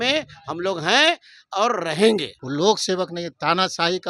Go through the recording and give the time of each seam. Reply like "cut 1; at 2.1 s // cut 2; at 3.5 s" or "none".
cut 1; at 2.4 s